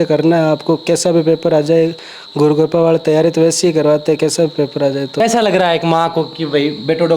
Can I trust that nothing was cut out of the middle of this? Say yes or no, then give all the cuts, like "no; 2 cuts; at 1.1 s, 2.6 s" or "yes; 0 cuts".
no; 1 cut; at 5.2 s